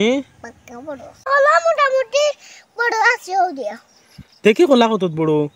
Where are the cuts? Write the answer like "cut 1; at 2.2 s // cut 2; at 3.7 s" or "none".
cut 1; at 1.2 s